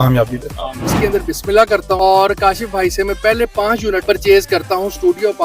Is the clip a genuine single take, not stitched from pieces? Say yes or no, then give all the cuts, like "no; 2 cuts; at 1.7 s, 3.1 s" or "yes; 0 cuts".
no; 3 cuts; at 1.0 s, 2.0 s, 4.0 s